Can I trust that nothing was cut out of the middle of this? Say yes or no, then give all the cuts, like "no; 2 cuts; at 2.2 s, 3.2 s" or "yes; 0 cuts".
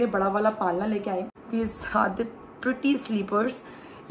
no; 1 cut; at 1.4 s